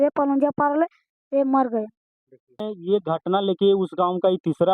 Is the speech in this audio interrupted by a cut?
yes; 1 cut; at 2.7 s

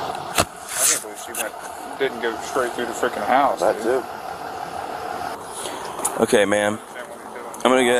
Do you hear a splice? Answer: no; 0 cuts

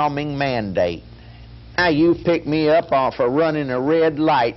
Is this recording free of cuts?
no; 1 cut; at 1.8 s

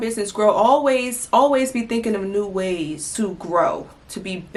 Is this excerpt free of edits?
yes; 0 cuts

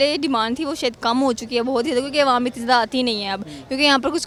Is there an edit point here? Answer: no; 0 cuts

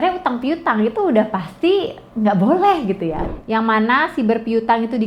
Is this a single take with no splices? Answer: no; 1 cut; at 3.2 s

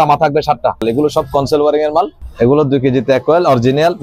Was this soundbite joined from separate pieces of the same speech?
yes; 2 cuts; at 0.8 s, 2.2 s

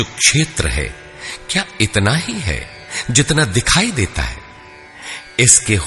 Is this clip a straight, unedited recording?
yes; 0 cuts

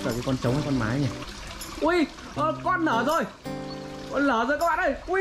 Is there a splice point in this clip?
no; 0 cuts

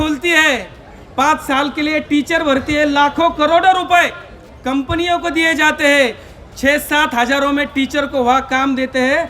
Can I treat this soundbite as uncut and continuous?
yes; 0 cuts

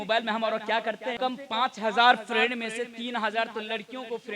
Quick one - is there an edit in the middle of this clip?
yes; 1 cut; at 1.2 s

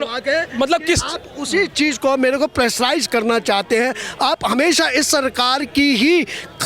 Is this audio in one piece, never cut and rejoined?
yes; 0 cuts

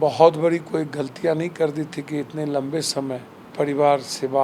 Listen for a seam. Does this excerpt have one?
yes; 1 cut; at 3.4 s

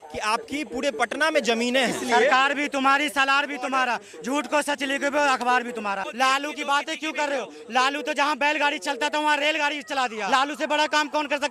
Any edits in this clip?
yes; 3 cuts; at 2.0 s, 6.1 s, 10.3 s

